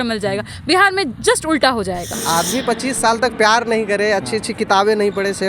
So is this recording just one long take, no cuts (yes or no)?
no